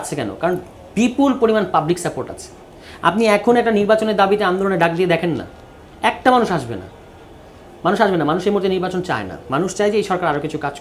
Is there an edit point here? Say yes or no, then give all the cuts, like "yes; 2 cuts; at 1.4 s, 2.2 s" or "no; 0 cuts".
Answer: no; 0 cuts